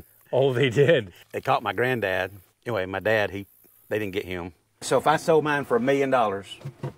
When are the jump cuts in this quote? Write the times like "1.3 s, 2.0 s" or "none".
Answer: 1.2 s, 2.5 s, 4.8 s